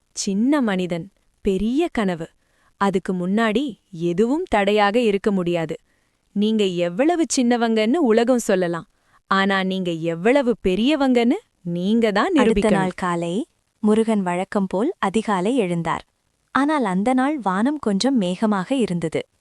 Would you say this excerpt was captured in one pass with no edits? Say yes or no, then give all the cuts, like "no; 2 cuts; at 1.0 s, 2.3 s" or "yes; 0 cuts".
no; 1 cut; at 12.6 s